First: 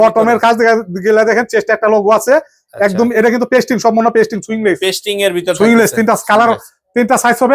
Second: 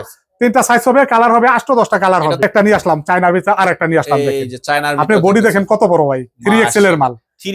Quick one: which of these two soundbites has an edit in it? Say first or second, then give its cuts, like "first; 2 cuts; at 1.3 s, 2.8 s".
second; 1 cut; at 2.4 s